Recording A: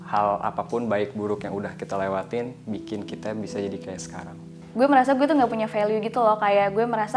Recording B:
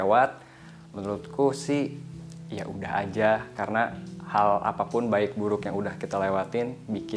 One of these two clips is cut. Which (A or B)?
A